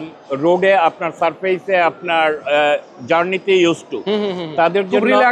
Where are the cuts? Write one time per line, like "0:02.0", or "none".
none